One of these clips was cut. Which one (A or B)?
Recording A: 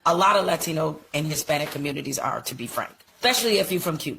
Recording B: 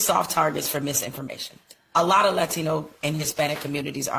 A